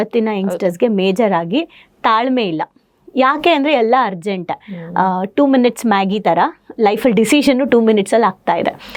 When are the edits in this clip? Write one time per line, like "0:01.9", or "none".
none